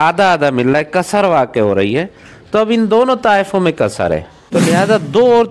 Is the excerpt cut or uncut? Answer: cut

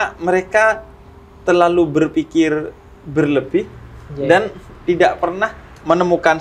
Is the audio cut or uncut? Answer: uncut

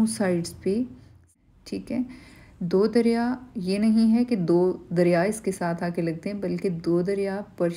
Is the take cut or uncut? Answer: cut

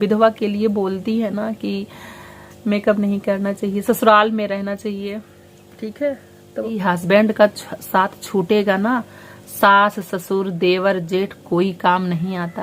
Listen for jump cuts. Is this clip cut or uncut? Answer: cut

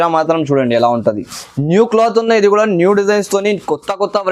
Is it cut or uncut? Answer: uncut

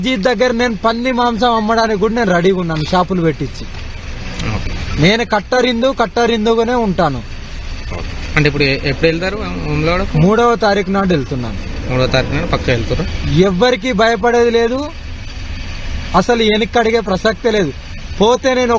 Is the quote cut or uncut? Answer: cut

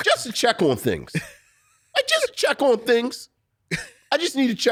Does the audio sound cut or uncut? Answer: uncut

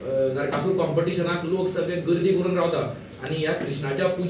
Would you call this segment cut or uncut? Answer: uncut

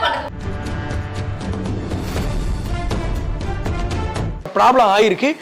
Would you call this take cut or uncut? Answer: cut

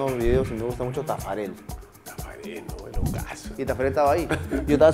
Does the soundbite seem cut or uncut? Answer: cut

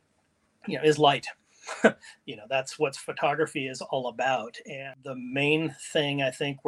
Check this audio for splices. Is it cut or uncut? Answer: cut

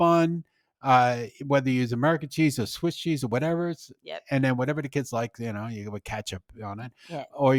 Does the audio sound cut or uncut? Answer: uncut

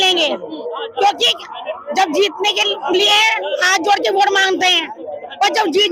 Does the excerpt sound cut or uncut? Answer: uncut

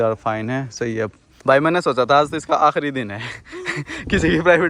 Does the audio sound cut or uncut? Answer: cut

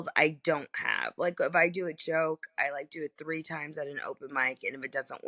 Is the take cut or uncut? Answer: uncut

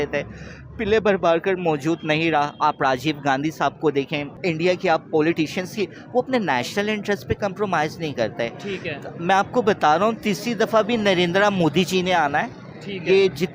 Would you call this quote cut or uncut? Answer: cut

